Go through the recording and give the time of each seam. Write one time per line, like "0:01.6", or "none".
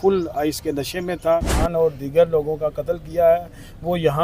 0:01.6